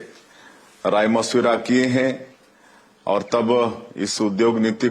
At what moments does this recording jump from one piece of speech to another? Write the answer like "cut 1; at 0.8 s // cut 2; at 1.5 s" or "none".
cut 1; at 1.0 s